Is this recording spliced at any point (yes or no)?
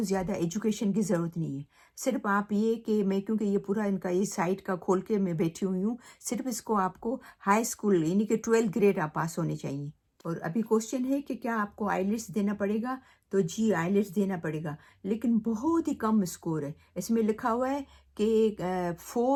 no